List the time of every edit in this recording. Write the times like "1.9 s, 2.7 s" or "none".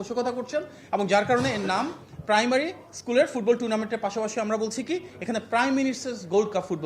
none